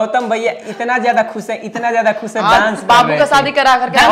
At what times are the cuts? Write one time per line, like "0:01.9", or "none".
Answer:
none

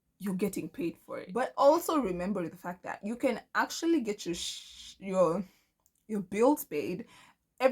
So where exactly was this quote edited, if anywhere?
0:01.3

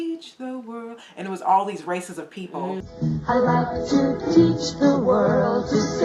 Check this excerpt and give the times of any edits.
0:02.9

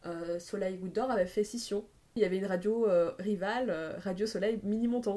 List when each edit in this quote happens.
0:02.2

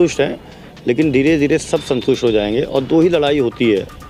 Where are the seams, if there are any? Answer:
none

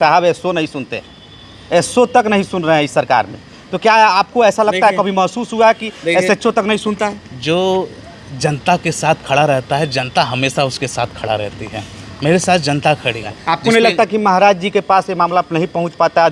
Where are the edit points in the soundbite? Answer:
0:13.3

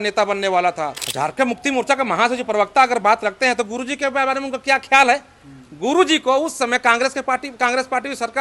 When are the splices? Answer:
0:01.0

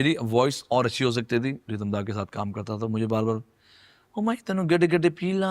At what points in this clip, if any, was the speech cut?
0:01.6

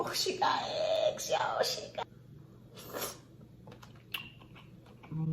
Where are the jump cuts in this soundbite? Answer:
0:02.0

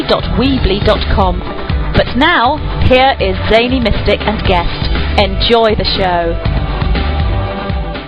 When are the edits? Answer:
none

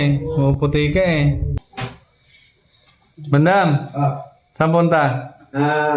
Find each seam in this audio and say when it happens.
0:01.7

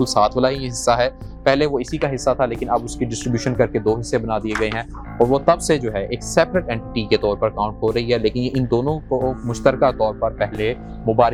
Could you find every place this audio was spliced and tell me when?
none

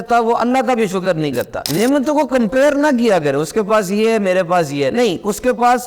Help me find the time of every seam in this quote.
0:01.6

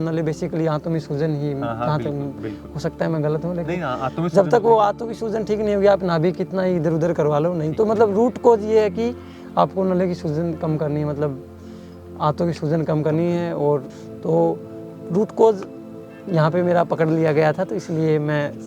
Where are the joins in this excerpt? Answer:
0:14.0

